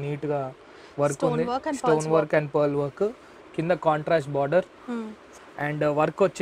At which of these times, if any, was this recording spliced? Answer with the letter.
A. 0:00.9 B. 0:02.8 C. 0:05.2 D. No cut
C